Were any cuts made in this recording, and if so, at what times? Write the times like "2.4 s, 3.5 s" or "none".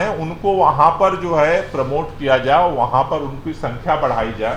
none